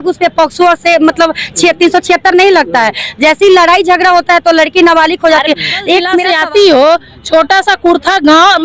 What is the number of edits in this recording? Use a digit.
1